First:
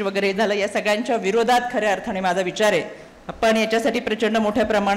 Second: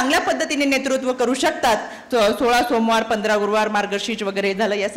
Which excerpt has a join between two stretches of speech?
second; 1 cut; at 1.9 s

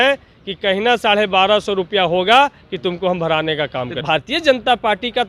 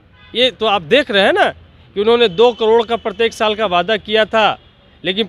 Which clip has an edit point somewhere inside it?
first; 1 cut; at 4.0 s

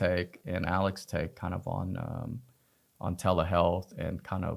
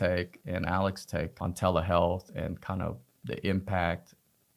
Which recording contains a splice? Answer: second; 1 cut; at 1.3 s

